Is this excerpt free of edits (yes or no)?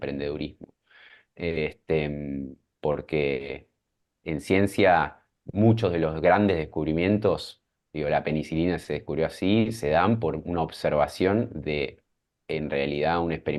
yes